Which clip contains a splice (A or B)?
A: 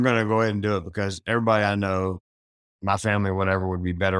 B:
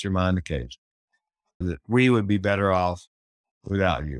B